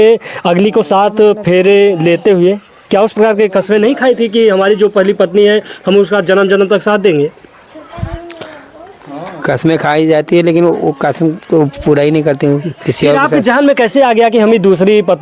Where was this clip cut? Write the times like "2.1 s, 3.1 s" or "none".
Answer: none